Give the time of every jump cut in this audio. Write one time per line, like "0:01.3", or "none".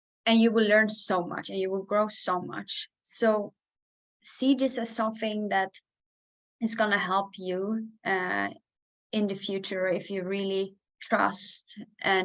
0:10.9